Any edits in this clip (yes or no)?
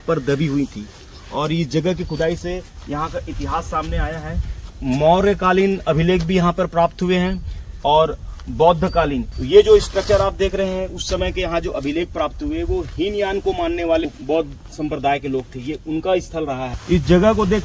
yes